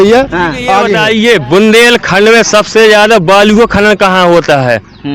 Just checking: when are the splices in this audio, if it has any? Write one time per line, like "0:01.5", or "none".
0:01.0